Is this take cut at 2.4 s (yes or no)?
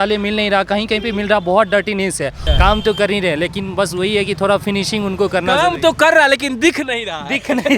yes